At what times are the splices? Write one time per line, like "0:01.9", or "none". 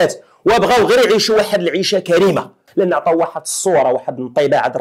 0:02.6